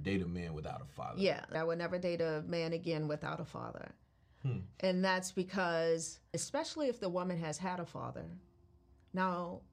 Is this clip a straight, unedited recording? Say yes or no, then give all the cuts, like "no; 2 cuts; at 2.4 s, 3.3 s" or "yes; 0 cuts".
no; 2 cuts; at 1.5 s, 6.3 s